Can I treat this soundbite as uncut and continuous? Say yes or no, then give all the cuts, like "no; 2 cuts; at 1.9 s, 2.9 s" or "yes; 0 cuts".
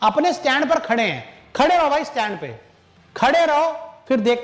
yes; 0 cuts